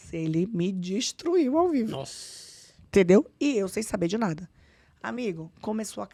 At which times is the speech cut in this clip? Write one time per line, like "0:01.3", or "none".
none